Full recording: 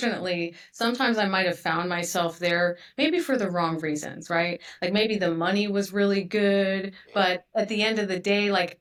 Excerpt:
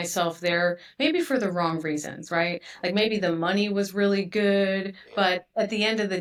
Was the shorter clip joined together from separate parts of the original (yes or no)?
no